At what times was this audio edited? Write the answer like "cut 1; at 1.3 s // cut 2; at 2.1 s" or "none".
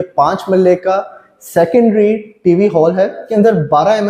cut 1; at 3.2 s